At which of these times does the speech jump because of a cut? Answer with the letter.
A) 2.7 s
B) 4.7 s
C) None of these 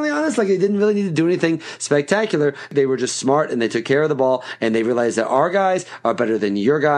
A